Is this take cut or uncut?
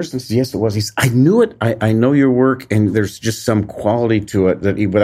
uncut